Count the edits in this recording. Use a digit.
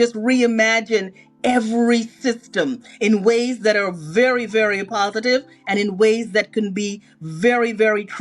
0